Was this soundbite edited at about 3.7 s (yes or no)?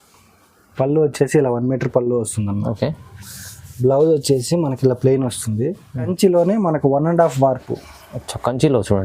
no